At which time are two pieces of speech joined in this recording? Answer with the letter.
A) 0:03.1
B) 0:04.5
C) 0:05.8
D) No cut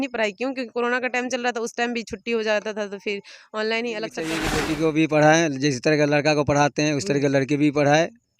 B